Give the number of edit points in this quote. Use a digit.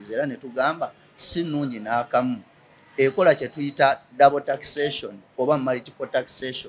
0